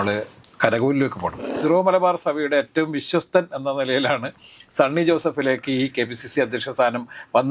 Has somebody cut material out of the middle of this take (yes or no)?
yes